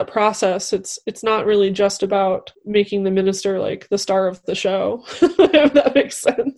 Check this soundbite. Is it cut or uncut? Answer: cut